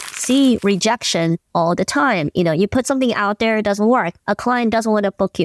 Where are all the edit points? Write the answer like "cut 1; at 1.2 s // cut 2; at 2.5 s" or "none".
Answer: none